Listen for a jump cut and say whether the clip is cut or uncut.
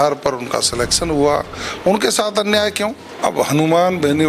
cut